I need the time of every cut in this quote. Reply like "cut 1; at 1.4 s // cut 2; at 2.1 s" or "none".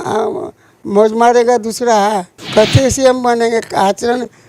cut 1; at 2.4 s